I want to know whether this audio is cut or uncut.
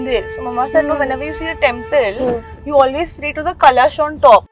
uncut